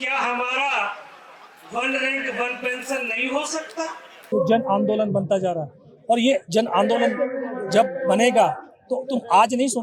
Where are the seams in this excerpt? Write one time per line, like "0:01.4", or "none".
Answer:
0:04.2